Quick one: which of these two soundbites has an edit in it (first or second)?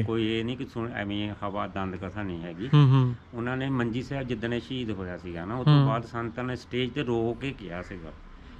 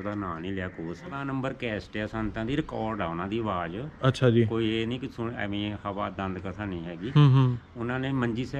second